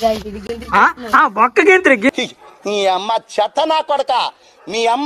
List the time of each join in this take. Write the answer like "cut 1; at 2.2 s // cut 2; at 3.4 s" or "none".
cut 1; at 2.1 s